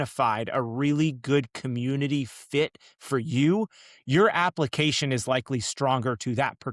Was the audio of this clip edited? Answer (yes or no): no